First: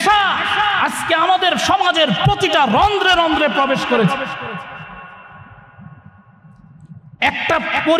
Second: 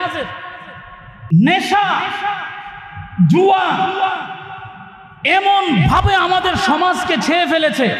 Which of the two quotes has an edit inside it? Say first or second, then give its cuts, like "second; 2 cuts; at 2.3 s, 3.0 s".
second; 1 cut; at 1.1 s